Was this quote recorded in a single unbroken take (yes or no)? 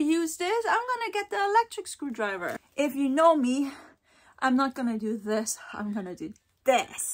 no